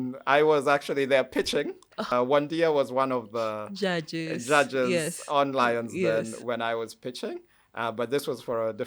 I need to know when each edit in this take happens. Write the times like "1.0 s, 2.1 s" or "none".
2.0 s